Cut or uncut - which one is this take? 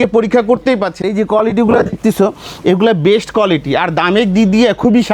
cut